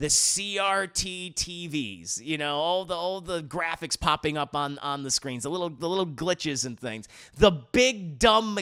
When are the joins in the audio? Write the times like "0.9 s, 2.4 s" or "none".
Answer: none